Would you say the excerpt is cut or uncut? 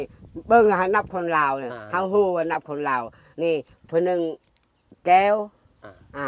uncut